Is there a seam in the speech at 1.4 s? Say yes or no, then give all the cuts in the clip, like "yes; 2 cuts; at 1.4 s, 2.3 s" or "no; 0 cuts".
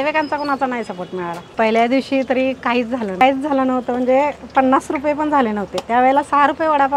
yes; 2 cuts; at 1.4 s, 3.2 s